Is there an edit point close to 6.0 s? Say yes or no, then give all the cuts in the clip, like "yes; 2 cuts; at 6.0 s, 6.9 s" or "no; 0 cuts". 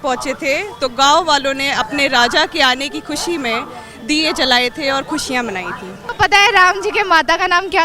yes; 1 cut; at 6.0 s